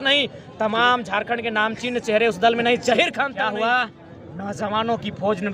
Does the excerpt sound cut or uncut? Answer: cut